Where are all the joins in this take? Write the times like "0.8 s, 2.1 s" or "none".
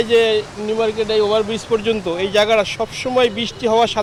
none